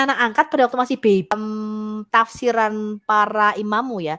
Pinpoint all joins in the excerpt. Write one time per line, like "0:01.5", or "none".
0:01.4